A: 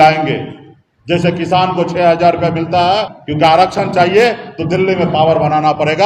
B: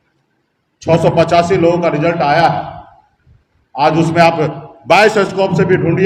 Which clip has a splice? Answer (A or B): A